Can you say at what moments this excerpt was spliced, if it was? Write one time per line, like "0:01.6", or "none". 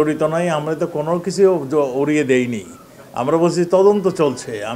none